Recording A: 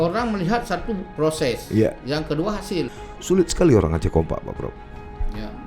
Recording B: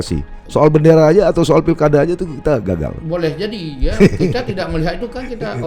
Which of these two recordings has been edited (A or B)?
A